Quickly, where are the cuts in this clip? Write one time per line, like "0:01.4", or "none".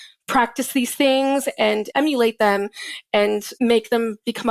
0:01.9
0:03.5